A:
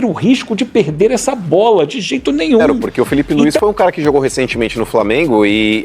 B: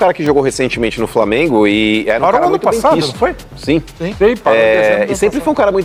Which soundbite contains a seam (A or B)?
A